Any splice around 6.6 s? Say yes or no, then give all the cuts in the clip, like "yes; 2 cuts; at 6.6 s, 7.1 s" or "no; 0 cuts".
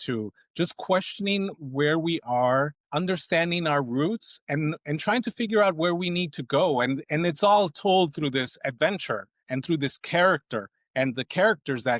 no; 1 cut; at 2.8 s